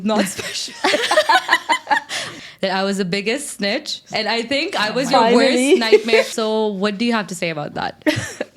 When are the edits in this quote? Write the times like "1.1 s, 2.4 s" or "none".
2.3 s, 6.3 s